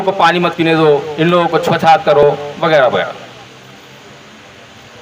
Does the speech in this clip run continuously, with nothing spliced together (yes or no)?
yes